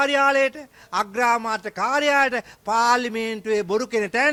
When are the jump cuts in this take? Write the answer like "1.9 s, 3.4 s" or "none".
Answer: none